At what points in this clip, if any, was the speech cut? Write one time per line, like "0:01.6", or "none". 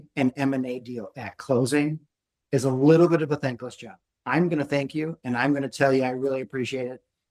none